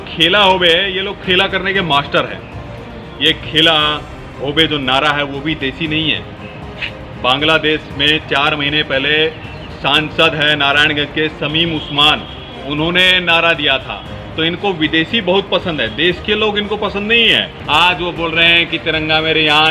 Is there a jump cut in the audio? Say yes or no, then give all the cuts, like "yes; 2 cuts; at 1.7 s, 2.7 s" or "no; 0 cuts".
yes; 1 cut; at 17.5 s